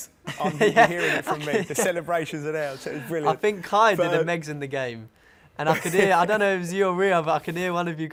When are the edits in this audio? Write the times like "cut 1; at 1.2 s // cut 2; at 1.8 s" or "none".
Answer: none